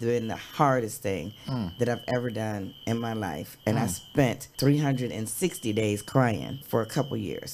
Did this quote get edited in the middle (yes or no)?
yes